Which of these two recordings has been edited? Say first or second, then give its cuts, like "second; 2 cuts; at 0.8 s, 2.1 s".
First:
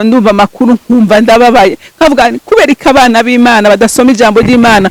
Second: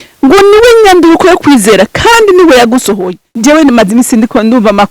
second; 1 cut; at 3.2 s